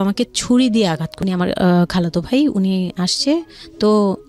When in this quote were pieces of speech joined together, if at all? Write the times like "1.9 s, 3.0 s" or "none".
1.1 s